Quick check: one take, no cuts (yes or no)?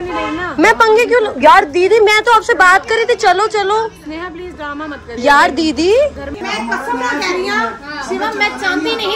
no